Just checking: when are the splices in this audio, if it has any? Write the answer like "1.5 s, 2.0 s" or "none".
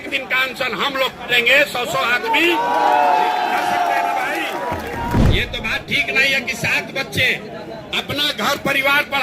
5.2 s